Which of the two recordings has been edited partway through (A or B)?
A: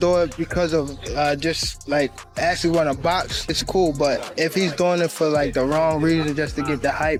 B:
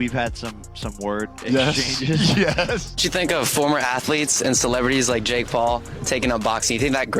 B